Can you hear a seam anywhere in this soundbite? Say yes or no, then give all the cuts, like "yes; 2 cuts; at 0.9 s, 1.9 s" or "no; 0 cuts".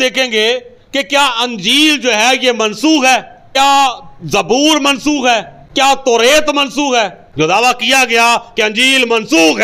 yes; 1 cut; at 7.2 s